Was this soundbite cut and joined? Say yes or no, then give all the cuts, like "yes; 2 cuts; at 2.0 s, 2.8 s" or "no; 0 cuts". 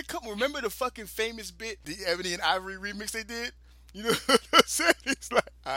yes; 1 cut; at 1.9 s